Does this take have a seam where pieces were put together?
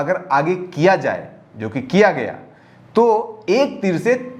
no; 0 cuts

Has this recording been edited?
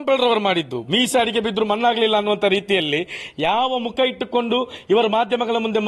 no; 0 cuts

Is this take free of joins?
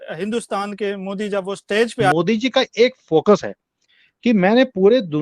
no; 1 cut; at 2.1 s

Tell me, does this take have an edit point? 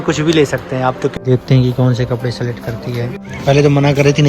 yes; 2 cuts; at 1.2 s, 3.2 s

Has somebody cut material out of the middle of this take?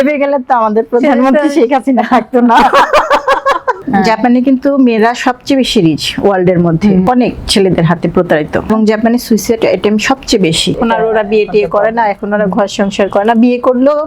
yes; 4 cuts; at 3.8 s, 7.0 s, 8.7 s, 10.8 s

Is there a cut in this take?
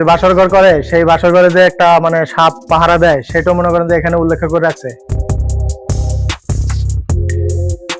no; 0 cuts

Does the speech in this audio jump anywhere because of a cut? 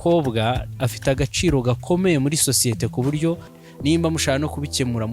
yes; 1 cut; at 3.6 s

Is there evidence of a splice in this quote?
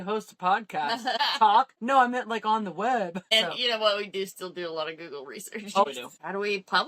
yes; 4 cuts; at 1.2 s, 1.8 s, 3.2 s, 5.8 s

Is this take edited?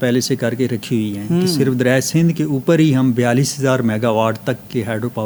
no; 0 cuts

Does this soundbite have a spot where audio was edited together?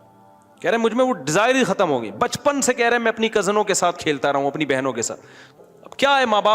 yes; 1 cut; at 5.4 s

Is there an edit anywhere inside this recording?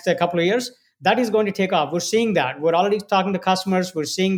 no; 0 cuts

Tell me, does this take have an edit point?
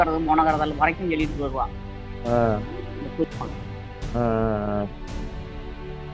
no; 0 cuts

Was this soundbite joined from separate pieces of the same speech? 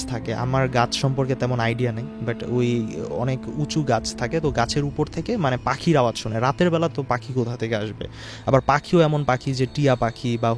no; 0 cuts

